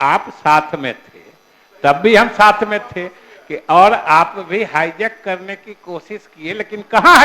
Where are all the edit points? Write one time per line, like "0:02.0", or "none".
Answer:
none